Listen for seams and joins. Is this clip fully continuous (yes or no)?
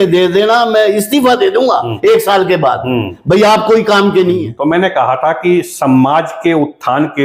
no